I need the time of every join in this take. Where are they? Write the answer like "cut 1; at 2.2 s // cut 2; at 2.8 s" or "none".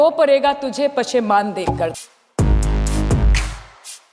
cut 1; at 1.9 s